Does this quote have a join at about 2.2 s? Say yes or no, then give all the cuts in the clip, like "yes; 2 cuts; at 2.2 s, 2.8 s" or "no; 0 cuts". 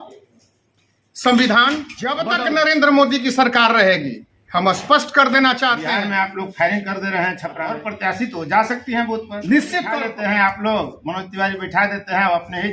yes; 4 cuts; at 2.2 s, 5.9 s, 7.7 s, 10.0 s